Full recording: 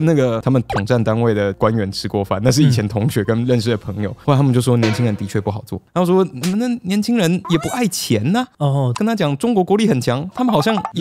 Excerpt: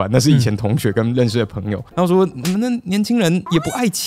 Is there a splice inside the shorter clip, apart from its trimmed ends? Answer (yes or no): yes